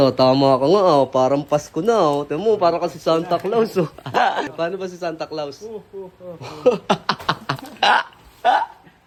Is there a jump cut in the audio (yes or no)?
no